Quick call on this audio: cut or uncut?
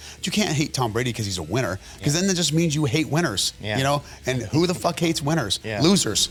uncut